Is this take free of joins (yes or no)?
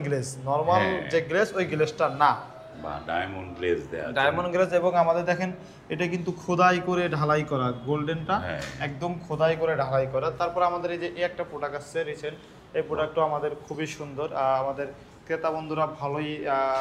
yes